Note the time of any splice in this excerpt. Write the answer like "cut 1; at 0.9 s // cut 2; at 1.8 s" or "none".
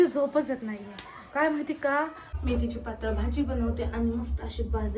cut 1; at 2.3 s